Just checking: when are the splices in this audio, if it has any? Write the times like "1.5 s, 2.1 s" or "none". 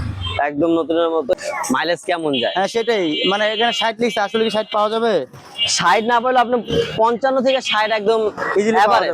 1.3 s